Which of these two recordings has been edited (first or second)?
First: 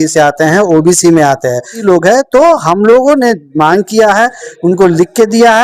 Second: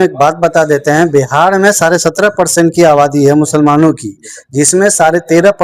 first